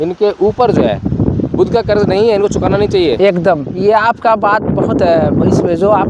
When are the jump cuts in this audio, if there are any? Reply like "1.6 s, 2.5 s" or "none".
none